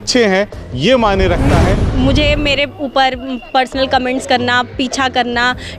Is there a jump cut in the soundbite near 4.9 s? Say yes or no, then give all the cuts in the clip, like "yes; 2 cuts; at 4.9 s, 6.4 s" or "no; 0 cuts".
no; 1 cut; at 1.8 s